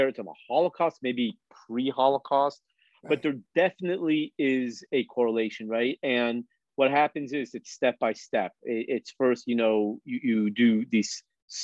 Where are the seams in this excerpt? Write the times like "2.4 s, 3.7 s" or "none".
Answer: none